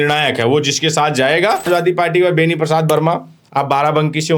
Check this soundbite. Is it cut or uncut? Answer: cut